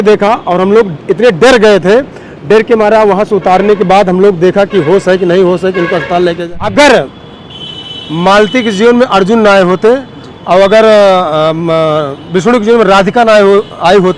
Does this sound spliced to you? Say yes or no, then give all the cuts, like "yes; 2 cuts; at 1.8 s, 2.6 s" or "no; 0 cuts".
yes; 1 cut; at 6.5 s